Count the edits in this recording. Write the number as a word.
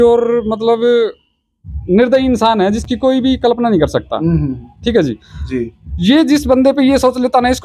zero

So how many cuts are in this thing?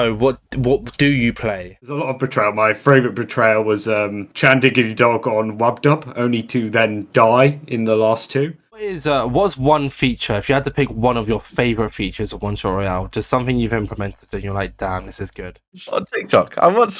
three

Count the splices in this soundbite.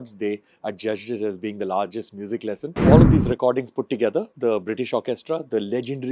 one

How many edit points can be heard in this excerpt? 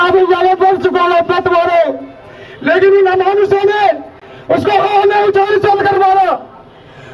zero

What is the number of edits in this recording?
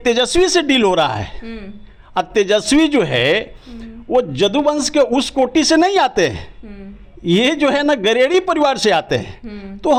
zero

